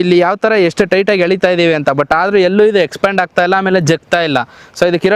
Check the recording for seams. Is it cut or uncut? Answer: uncut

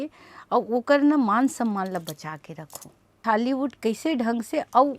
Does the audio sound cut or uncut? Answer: cut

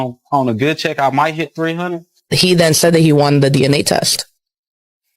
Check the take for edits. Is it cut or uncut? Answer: cut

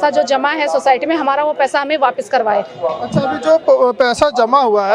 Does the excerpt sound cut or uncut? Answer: uncut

